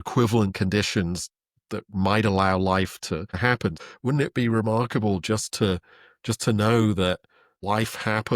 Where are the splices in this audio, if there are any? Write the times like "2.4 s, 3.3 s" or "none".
3.8 s, 7.5 s